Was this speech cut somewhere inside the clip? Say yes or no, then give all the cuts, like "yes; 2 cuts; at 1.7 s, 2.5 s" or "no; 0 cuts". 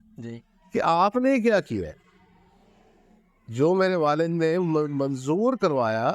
no; 0 cuts